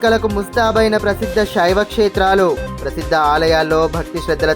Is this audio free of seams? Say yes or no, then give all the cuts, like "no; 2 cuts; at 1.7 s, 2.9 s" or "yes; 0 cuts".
yes; 0 cuts